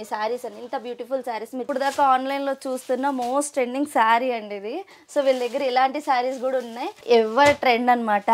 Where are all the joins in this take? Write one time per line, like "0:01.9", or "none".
0:01.6
0:06.9